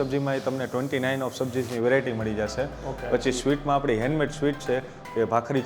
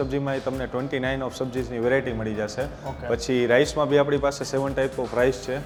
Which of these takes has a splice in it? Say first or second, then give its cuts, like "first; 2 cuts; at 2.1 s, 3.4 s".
first; 1 cut; at 2.9 s